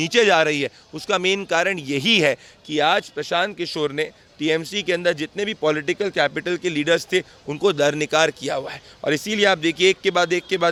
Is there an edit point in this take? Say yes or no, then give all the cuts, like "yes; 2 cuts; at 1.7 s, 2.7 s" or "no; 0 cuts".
no; 0 cuts